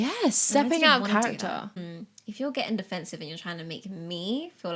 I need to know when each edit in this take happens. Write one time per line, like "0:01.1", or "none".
0:01.8